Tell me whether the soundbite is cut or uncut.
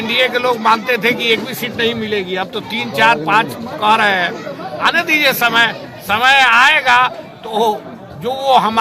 uncut